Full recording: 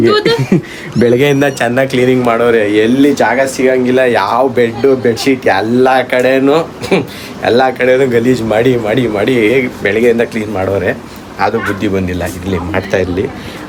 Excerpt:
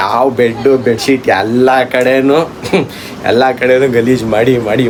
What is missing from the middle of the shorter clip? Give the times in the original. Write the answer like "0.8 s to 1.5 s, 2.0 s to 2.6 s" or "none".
none